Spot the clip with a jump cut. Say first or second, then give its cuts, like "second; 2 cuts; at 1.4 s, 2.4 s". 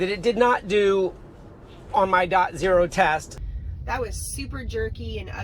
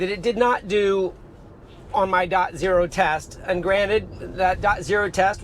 first; 1 cut; at 3.3 s